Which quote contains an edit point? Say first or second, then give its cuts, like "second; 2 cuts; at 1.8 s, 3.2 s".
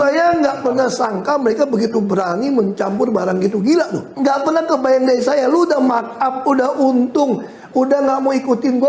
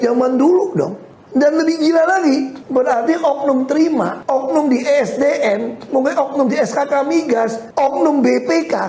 first; 1 cut; at 4.1 s